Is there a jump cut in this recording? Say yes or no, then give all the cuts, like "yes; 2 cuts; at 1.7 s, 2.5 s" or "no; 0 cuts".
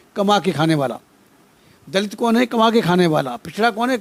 no; 0 cuts